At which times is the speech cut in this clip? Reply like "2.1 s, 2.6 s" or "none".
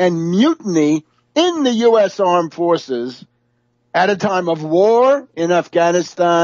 4.5 s